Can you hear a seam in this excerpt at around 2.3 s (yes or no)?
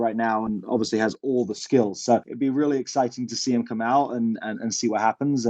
yes